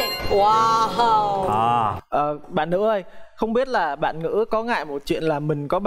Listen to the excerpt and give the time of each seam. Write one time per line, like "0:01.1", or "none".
0:02.0